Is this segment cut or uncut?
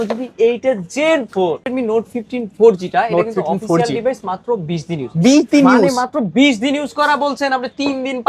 cut